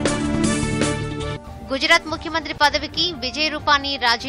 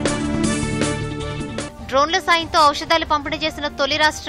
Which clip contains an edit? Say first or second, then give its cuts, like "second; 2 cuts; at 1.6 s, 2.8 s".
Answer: second; 1 cut; at 1.2 s